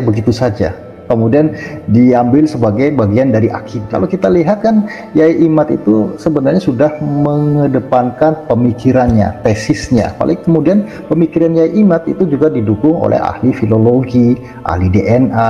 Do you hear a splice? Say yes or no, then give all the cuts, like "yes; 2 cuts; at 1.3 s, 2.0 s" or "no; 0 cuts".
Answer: yes; 2 cuts; at 3.7 s, 10.1 s